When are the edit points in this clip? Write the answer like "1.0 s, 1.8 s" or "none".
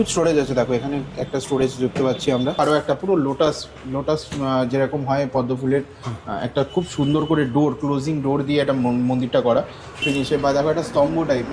2.6 s, 10.0 s